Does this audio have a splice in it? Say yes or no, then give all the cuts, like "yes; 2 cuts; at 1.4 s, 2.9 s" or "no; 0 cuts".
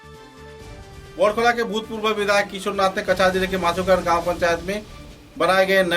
yes; 1 cut; at 0.9 s